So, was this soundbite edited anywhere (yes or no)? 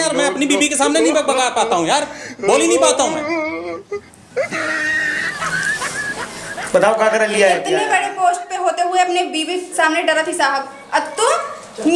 no